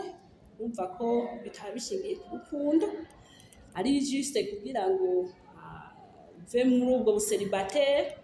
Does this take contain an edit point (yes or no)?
no